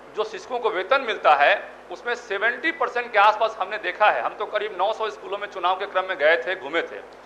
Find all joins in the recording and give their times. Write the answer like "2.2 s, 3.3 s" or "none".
none